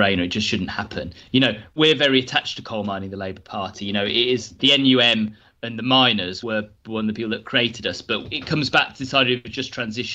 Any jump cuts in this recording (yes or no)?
yes